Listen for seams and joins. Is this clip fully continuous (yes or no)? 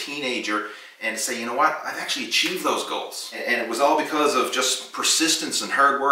no